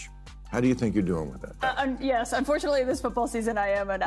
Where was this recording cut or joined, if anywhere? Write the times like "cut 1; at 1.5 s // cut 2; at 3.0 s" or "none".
cut 1; at 1.4 s